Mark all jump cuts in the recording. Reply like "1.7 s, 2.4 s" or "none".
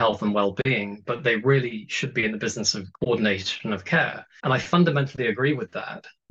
2.8 s, 4.2 s